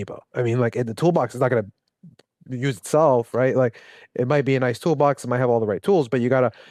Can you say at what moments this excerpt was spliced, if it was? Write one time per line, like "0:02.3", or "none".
none